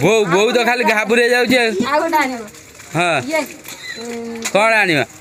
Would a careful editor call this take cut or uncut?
uncut